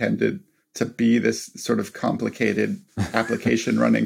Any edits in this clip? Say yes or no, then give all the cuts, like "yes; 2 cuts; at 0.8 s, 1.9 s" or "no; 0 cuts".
yes; 1 cut; at 2.9 s